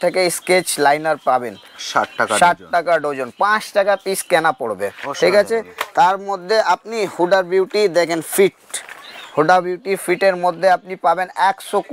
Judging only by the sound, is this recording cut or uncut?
uncut